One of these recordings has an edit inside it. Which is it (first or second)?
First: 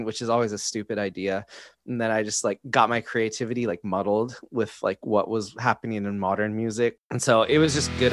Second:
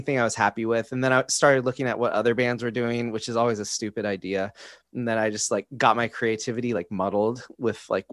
first